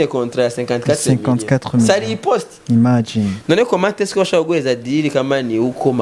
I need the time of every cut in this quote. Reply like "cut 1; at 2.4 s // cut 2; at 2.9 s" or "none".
none